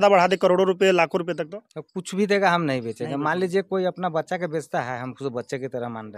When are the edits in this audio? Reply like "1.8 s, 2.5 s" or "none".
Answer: none